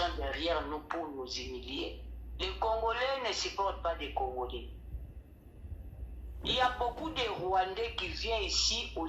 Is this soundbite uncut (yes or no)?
yes